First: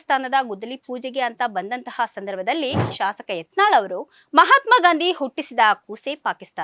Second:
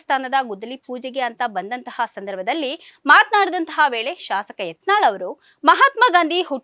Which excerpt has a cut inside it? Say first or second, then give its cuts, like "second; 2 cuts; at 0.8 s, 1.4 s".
first; 1 cut; at 2.9 s